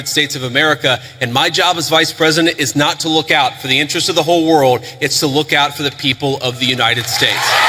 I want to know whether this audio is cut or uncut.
uncut